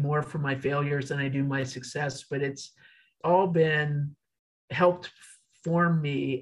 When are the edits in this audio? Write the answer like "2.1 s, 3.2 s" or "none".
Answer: 3.2 s